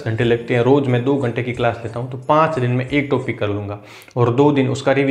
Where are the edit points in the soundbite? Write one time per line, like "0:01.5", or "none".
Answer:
none